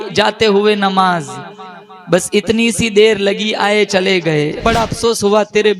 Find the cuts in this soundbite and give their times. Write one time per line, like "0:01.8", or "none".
0:04.6